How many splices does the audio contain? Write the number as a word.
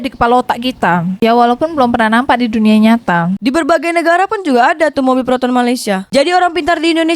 two